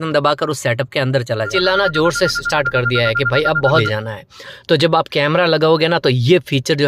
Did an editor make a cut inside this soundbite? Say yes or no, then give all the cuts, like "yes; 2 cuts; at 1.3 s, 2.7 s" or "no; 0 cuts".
yes; 2 cuts; at 1.5 s, 3.7 s